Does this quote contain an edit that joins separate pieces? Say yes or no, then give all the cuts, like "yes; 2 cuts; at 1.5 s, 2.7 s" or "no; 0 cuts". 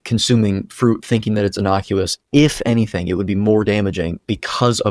no; 0 cuts